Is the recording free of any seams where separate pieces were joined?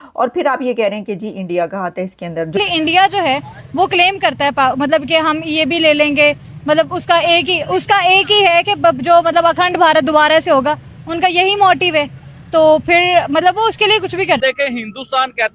no; 1 cut; at 2.5 s

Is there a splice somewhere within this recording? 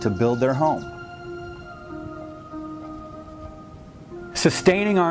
yes; 1 cut; at 1.2 s

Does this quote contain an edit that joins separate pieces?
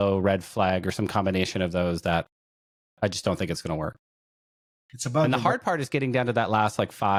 no; 0 cuts

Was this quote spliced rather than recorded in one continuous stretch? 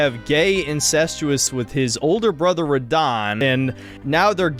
yes; 2 cuts; at 1.5 s, 3.4 s

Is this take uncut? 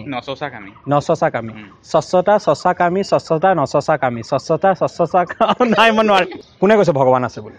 no; 1 cut; at 6.4 s

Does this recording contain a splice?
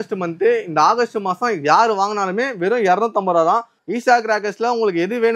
yes; 1 cut; at 3.8 s

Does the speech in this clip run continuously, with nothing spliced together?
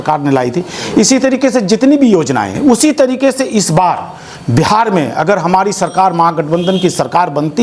yes; 0 cuts

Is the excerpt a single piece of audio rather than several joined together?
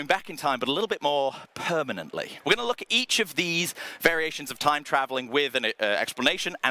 no; 1 cut; at 2.3 s

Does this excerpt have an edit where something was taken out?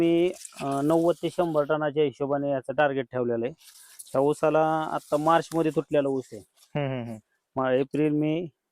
no; 0 cuts

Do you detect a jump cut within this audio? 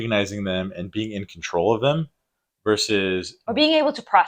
no; 0 cuts

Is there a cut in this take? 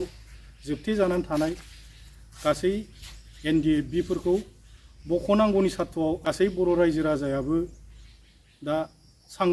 yes; 1 cut; at 6.3 s

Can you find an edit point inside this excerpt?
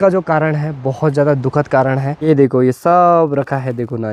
yes; 1 cut; at 2.1 s

